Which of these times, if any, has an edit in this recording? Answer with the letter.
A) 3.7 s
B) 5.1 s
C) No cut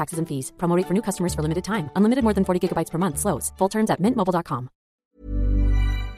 B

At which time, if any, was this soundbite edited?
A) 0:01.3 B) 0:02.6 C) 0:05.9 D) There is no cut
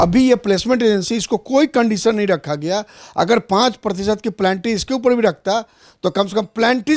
D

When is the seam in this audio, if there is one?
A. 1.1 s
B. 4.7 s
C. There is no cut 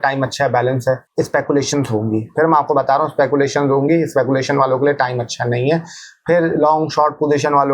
A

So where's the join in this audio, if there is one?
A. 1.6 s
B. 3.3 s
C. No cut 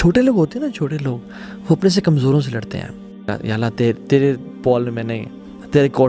B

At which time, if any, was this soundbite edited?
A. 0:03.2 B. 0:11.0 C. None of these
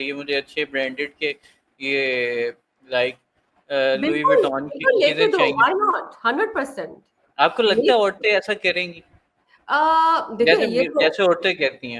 C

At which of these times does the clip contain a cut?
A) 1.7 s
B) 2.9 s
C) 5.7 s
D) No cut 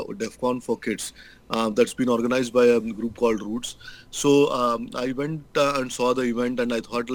D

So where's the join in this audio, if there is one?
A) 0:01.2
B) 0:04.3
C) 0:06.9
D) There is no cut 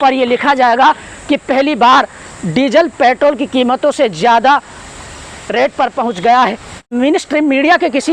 C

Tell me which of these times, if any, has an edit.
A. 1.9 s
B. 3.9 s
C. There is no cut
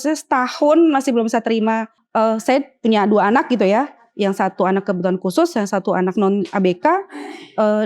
A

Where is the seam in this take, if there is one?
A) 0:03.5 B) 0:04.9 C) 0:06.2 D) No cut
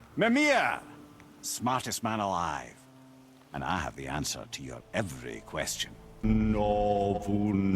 C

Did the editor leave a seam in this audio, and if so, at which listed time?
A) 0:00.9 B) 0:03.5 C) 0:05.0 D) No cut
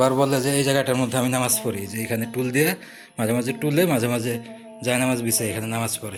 D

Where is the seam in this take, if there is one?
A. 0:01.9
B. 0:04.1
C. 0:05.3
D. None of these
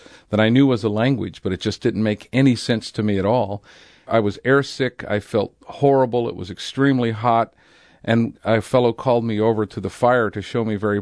B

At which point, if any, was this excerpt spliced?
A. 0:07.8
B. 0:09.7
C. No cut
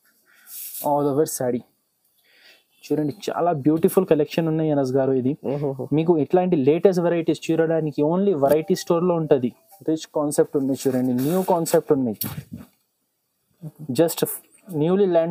B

